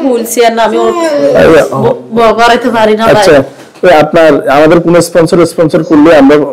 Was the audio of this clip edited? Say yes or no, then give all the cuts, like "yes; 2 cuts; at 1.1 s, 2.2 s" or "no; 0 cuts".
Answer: no; 0 cuts